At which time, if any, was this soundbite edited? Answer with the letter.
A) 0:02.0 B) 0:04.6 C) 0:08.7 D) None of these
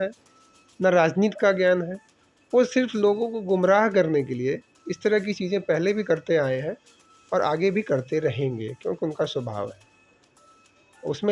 D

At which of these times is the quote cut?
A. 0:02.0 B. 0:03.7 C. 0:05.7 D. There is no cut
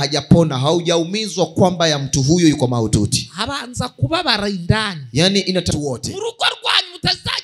C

